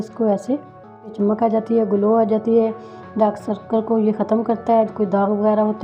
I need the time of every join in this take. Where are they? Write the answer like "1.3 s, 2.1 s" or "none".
1.1 s